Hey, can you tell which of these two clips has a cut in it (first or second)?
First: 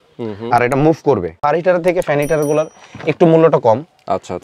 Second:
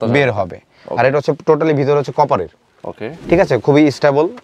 first